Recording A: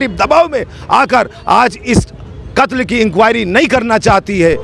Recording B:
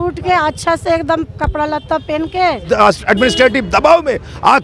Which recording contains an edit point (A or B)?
B